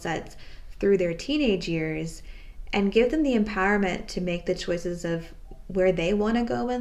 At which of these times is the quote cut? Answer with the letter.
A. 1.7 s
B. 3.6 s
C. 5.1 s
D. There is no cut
D